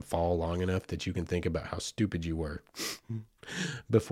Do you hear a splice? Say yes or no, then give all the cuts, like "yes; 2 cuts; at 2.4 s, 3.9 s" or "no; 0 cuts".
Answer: no; 0 cuts